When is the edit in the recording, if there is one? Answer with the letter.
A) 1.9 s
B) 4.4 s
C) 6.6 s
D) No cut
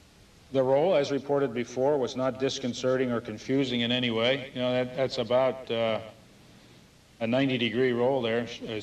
A